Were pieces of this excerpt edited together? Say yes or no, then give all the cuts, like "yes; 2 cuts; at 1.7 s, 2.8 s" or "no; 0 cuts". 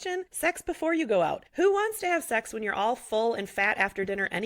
yes; 1 cut; at 1.4 s